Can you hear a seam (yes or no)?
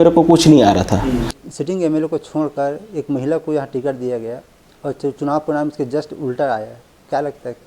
yes